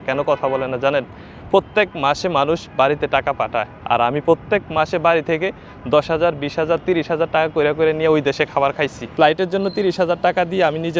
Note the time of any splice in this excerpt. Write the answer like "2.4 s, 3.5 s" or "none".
9.1 s

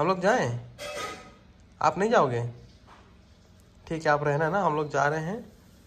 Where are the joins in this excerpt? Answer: none

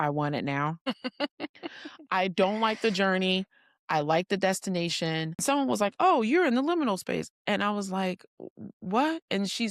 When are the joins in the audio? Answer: 5.4 s

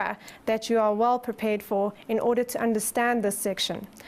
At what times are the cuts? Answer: 1.8 s

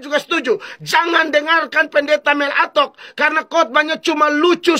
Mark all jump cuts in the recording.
none

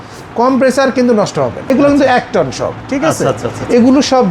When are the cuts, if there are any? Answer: 1.7 s

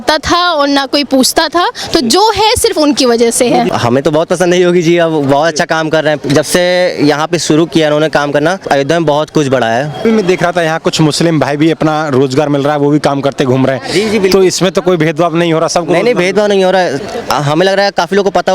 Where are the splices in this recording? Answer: 3.7 s, 8.6 s, 10.0 s

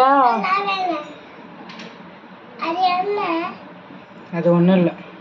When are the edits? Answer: none

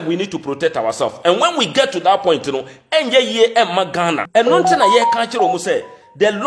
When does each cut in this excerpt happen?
4.2 s

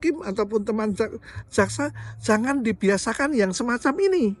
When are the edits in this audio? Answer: none

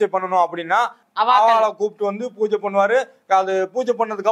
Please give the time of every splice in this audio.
1.0 s

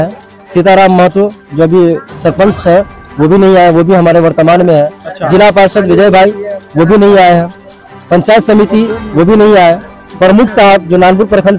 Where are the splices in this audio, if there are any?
none

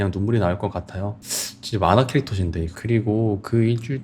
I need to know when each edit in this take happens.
1.2 s, 2.7 s

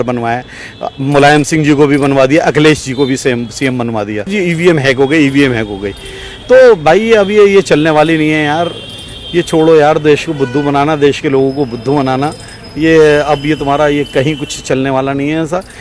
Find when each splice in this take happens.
4.3 s

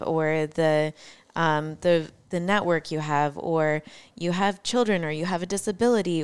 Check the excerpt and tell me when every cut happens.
none

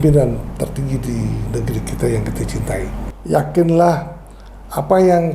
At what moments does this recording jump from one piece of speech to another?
3.1 s

